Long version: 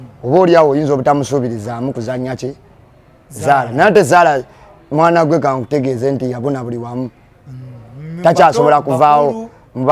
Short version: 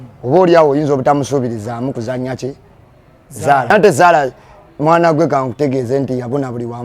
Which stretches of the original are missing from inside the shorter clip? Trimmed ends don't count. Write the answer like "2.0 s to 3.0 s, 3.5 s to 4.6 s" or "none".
3.7 s to 3.8 s